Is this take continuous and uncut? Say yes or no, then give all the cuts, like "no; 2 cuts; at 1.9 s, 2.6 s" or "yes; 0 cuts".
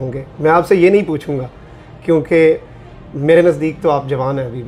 yes; 0 cuts